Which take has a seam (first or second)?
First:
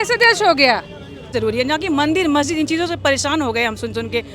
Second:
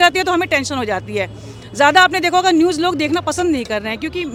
first